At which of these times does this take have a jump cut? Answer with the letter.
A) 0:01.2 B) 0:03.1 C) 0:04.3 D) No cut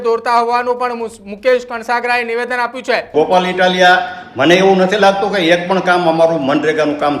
B